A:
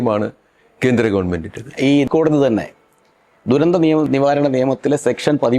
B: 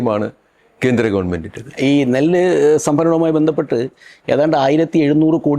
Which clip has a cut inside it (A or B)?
A